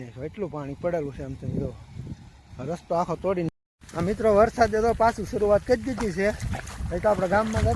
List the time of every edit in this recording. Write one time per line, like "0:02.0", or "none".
0:03.5

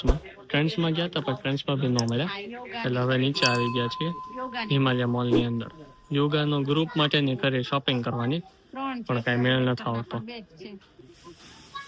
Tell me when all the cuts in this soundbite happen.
none

